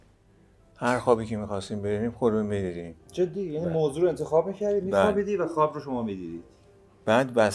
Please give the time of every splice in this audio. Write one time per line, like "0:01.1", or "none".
none